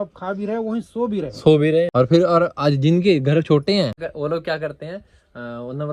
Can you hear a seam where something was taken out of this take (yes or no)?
yes